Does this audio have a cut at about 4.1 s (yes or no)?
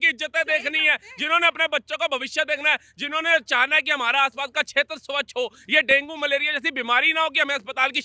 no